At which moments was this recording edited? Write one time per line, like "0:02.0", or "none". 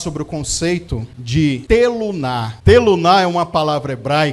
0:01.3
0:02.5